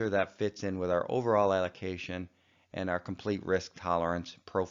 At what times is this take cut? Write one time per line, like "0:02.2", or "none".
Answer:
none